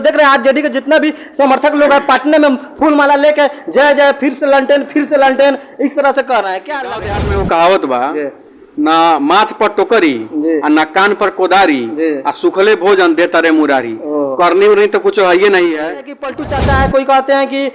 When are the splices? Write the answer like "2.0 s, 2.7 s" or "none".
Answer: 7.1 s, 16.3 s